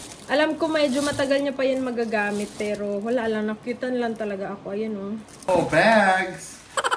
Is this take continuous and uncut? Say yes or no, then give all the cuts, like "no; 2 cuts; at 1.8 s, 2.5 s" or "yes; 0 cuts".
no; 1 cut; at 5.5 s